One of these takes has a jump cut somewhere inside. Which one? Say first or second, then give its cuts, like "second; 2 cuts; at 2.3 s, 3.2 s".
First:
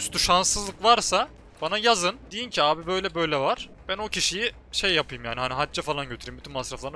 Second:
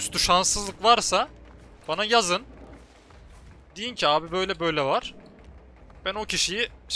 first; 3 cuts; at 1.4 s, 2.3 s, 3.7 s